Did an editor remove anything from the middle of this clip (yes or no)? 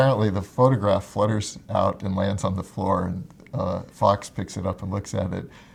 no